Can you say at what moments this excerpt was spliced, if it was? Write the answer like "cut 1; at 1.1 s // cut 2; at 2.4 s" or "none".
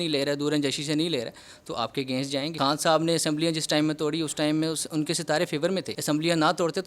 cut 1; at 2.5 s // cut 2; at 5.9 s